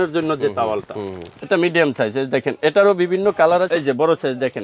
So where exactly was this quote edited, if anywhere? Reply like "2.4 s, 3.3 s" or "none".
1.3 s, 3.7 s